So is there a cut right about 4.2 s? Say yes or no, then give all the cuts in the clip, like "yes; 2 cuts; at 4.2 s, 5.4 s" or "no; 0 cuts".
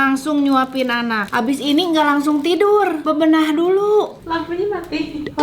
yes; 3 cuts; at 1.2 s, 3.0 s, 4.2 s